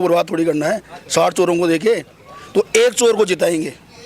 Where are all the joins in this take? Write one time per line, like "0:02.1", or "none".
none